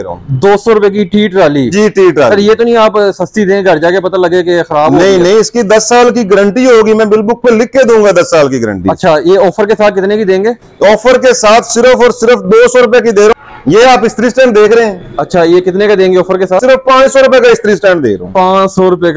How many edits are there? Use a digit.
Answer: 2